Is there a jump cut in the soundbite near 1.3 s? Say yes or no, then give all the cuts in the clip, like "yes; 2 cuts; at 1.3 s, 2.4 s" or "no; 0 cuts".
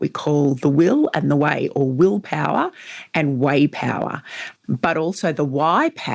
no; 1 cut; at 4.4 s